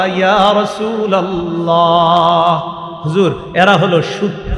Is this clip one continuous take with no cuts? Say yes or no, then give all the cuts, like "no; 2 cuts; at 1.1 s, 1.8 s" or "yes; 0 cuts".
yes; 0 cuts